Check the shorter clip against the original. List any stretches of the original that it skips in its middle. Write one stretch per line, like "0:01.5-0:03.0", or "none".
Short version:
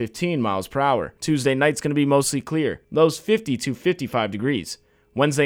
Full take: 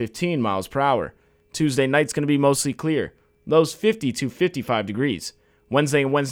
0:01.1-0:01.5
0:03.1-0:03.4

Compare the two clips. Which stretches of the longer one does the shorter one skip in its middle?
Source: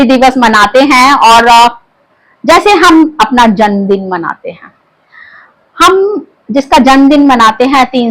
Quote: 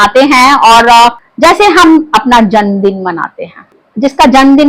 0:01.8-0:02.3
0:04.9-0:06.3

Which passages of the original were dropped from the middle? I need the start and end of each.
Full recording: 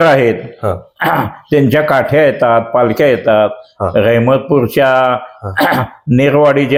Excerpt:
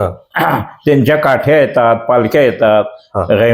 none

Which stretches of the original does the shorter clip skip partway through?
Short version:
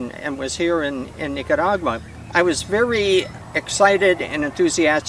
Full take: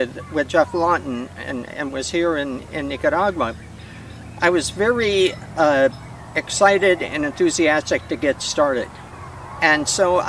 0:03.7-0:04.2
0:05.4-0:06.2

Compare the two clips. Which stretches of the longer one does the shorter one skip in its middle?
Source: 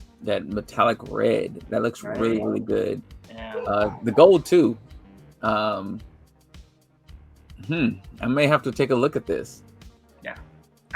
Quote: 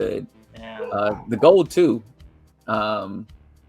none

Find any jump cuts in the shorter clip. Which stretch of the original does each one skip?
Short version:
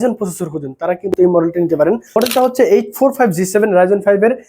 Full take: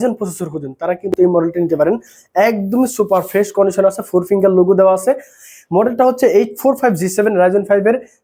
0:02.2-0:05.8

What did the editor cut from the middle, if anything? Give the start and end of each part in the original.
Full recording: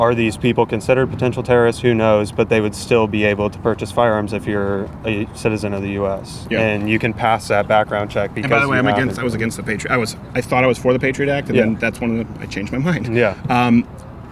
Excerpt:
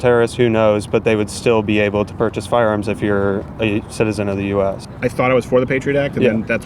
0:06.3-0:10.2

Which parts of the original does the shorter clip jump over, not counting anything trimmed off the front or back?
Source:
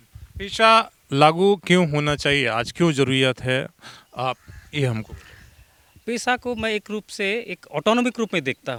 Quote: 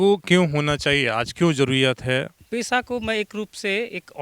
0:03.8-0:05.9

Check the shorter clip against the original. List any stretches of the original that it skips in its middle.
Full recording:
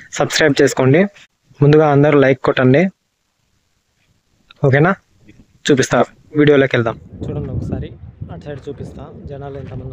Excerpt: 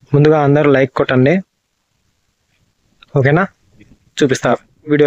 none

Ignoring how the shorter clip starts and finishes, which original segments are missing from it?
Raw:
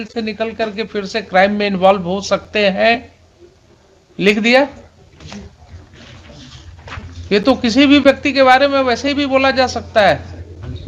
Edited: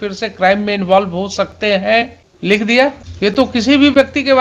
0:03.2-0:04.0
0:04.8-0:07.2

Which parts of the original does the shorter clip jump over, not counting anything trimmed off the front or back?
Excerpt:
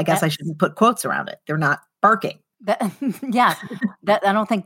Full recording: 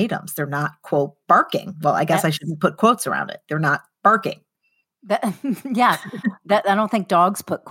0:04.5-0:04.9

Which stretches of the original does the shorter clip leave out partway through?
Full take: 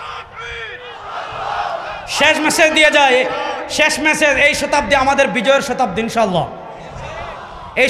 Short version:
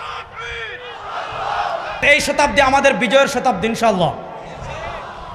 0:02.0-0:04.4

